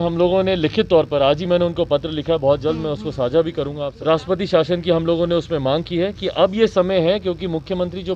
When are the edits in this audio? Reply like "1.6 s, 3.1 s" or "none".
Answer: 3.9 s